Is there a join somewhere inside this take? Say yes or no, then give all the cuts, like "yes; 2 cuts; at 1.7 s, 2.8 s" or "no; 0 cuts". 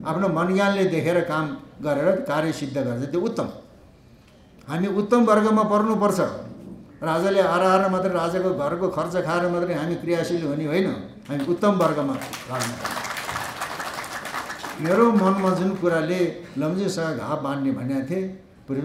no; 0 cuts